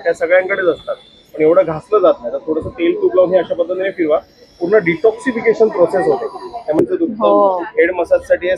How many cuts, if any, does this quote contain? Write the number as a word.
one